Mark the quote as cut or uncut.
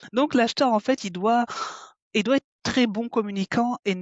uncut